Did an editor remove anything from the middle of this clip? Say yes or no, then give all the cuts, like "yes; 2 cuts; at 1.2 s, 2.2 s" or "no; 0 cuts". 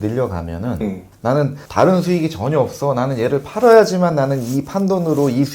yes; 1 cut; at 1.4 s